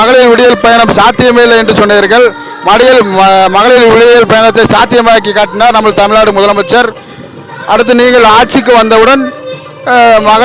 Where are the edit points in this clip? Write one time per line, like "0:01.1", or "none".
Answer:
none